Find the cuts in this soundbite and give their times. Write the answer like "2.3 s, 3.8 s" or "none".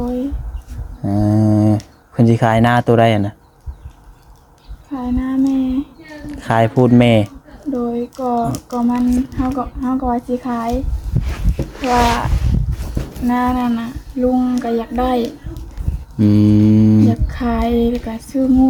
none